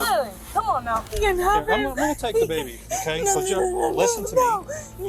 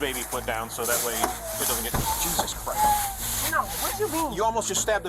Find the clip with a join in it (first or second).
first